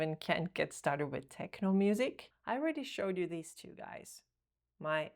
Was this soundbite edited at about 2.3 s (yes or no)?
yes